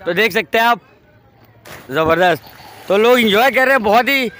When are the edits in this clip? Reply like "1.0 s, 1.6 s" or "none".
none

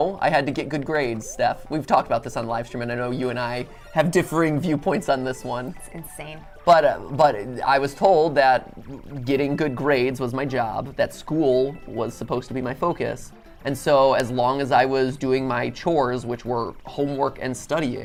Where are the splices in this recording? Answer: none

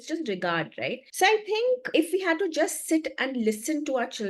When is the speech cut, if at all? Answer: 1.0 s, 1.8 s

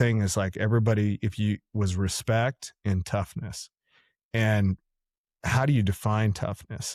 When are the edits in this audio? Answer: none

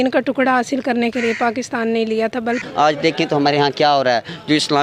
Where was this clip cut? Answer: 2.6 s

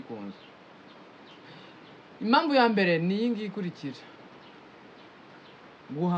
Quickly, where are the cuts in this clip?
none

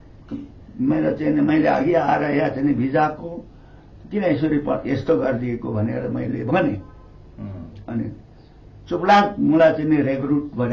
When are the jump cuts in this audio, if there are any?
none

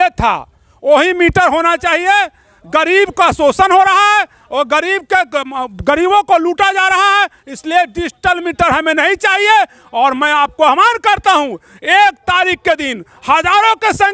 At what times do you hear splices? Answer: none

